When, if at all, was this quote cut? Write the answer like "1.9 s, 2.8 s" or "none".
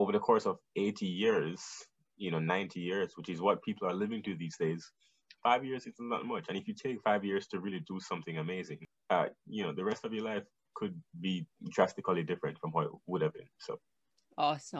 8.9 s, 10.6 s